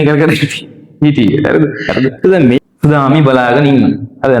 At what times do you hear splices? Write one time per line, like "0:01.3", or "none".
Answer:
0:02.6